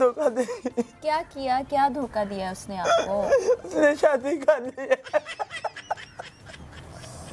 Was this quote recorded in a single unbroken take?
yes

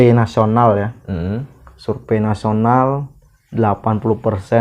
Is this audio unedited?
yes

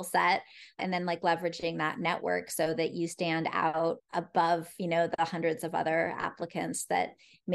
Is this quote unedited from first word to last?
no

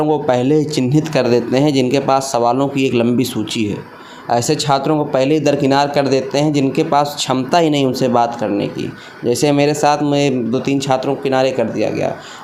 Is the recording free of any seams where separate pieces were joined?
yes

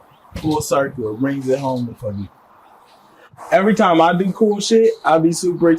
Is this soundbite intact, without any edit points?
no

